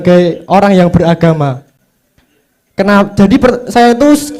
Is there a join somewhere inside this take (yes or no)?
no